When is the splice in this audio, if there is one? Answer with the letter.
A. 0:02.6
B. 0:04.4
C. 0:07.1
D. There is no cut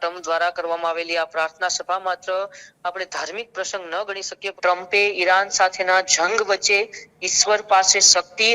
B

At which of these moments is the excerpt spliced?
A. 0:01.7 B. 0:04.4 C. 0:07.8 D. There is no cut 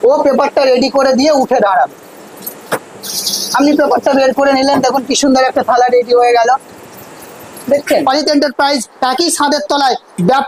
C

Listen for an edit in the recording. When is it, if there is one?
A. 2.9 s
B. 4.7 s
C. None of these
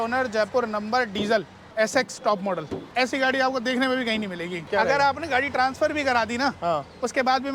B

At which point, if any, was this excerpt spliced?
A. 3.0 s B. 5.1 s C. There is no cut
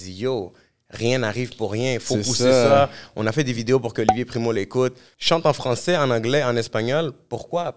B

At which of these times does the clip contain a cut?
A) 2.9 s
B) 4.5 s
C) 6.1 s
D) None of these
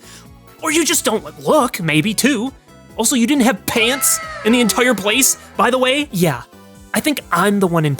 C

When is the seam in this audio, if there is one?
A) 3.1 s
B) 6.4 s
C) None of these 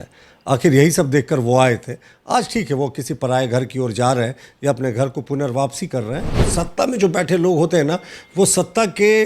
B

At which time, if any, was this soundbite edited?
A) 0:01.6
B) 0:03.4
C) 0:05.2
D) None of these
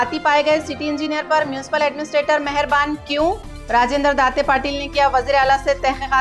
D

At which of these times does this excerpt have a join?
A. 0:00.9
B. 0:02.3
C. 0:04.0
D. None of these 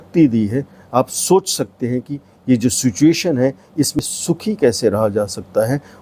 C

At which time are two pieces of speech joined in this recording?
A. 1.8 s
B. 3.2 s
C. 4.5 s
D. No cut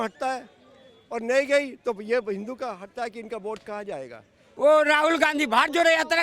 C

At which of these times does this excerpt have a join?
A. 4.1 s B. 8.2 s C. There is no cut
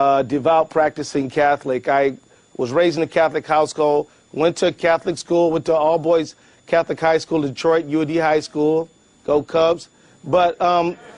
B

